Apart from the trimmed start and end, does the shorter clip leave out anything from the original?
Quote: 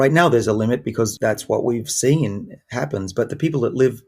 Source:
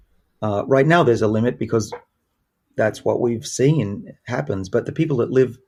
yes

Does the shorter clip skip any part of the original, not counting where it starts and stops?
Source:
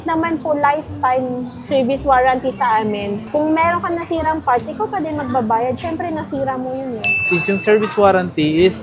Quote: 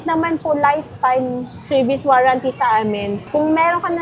no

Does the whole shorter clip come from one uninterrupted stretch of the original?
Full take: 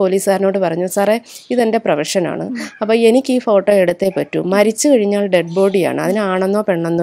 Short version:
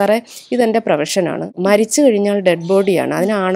no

